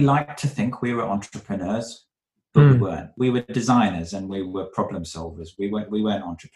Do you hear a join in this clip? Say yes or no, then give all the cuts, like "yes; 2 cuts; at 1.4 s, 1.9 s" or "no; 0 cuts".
yes; 1 cut; at 3.1 s